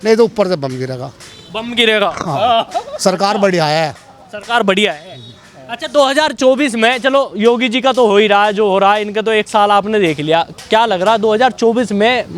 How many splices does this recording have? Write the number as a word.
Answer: zero